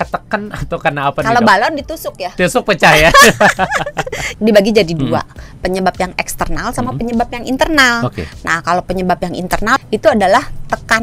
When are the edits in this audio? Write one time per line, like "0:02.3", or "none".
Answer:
0:04.3
0:09.8